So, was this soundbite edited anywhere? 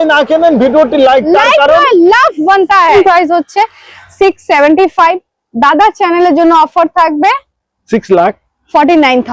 yes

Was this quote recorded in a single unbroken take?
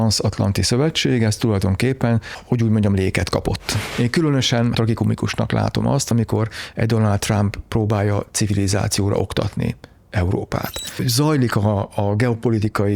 no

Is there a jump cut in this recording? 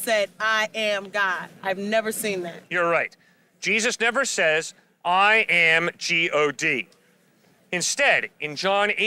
no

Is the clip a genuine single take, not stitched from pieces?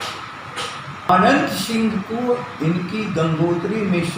no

